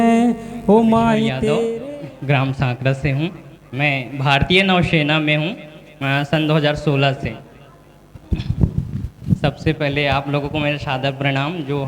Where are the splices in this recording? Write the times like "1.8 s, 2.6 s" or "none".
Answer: 1.7 s